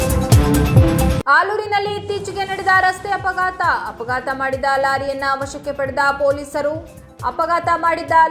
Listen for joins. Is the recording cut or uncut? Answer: cut